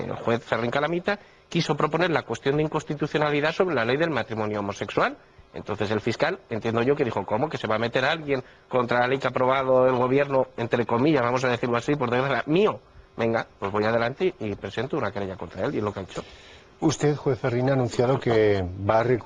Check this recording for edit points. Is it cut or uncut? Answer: uncut